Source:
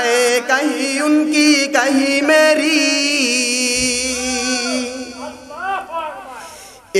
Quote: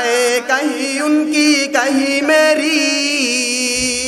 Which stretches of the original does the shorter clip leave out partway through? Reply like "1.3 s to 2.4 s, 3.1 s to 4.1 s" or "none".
none